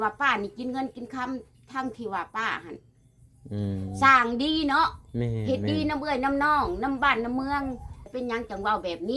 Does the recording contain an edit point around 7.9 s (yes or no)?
yes